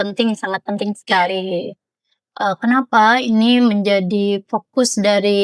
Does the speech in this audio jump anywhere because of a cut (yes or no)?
no